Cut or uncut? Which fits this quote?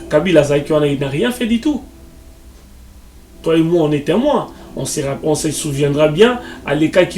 uncut